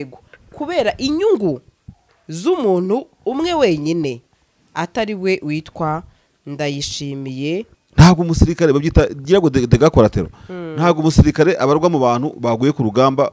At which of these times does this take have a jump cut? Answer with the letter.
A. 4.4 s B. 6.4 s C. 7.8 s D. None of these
C